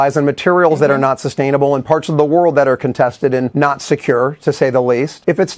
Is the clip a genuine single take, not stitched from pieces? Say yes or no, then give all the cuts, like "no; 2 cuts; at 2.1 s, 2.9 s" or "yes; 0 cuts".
yes; 0 cuts